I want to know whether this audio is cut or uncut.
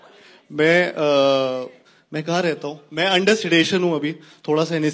uncut